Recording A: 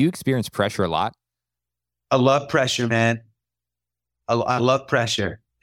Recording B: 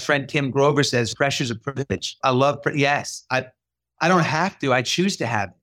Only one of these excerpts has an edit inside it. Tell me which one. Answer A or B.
B